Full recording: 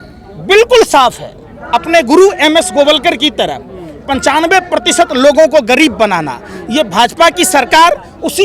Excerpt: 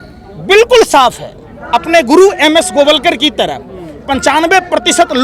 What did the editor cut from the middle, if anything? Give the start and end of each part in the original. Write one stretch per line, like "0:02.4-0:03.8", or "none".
none